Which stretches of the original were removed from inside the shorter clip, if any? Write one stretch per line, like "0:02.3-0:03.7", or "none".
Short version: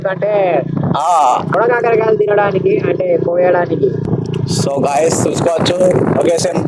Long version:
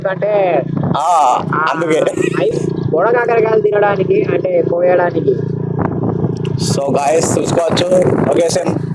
0:01.5-0:03.0
0:05.5-0:06.2